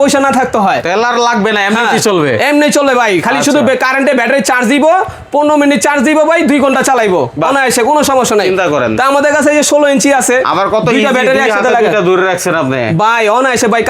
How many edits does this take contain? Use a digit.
0